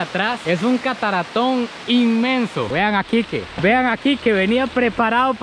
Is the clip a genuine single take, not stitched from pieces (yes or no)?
no